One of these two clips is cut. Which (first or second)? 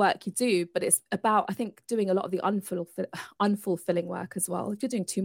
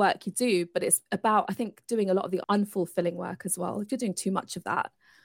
second